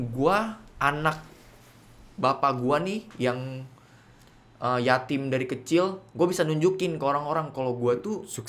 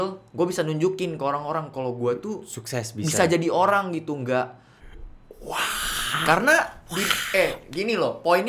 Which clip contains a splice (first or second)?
second